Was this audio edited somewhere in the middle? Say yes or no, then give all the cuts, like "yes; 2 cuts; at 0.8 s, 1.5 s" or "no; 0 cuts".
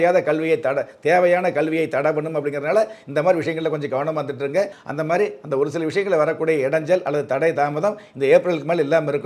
yes; 1 cut; at 4.8 s